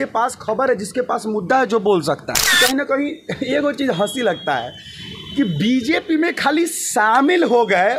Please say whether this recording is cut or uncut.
cut